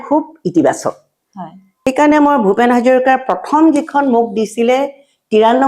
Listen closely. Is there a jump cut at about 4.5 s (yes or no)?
no